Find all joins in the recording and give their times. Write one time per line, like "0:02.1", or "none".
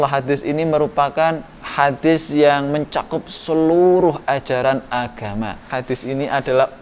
0:01.6
0:05.7